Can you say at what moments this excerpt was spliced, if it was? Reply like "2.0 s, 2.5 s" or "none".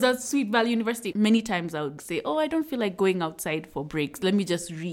1.1 s, 2.0 s